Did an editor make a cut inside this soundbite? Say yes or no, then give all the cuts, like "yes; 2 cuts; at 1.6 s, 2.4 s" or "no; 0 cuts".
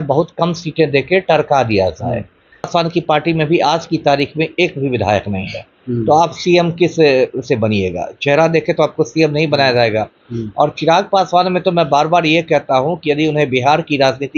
yes; 1 cut; at 2.7 s